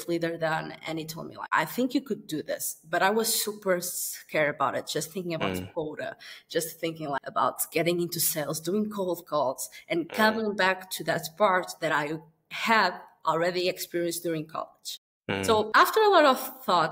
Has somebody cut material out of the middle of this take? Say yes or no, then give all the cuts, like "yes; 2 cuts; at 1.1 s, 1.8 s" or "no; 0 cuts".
yes; 1 cut; at 1.3 s